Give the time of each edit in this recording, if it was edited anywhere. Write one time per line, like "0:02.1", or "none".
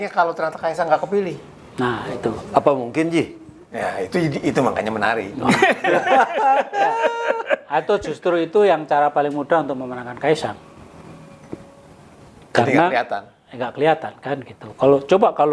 none

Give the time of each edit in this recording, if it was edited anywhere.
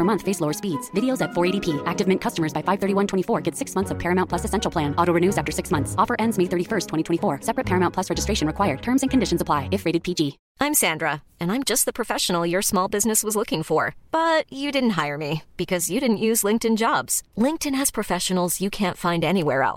0:10.4

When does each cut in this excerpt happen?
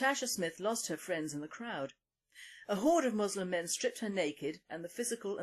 none

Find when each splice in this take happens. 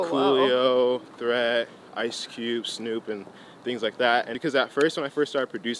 0:04.3

